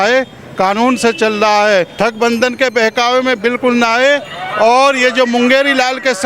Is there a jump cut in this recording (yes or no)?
yes